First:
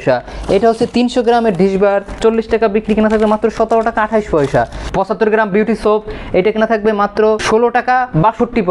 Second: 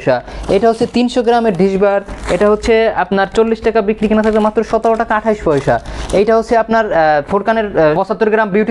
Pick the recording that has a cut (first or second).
first